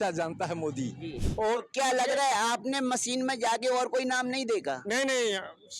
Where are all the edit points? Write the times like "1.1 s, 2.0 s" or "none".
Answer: 1.2 s